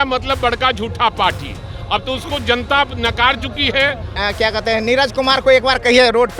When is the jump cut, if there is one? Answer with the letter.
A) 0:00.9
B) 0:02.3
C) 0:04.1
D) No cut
C